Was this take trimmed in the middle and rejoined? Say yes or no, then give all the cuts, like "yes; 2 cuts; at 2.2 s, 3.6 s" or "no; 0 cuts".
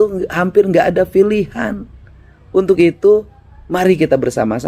no; 0 cuts